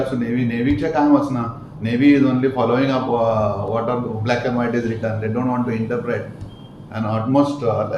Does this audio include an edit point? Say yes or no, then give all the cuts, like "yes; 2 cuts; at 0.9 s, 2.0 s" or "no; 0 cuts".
no; 0 cuts